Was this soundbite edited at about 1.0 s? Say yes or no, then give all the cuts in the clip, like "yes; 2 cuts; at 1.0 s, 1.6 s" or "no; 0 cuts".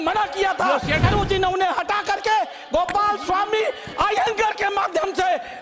yes; 1 cut; at 1.0 s